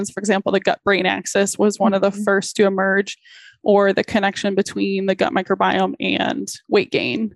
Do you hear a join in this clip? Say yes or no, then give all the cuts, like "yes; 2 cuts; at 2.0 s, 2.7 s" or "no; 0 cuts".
no; 0 cuts